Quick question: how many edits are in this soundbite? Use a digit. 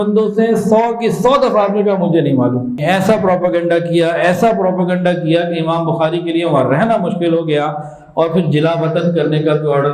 1